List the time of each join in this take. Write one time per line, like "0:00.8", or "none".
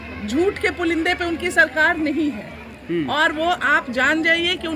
none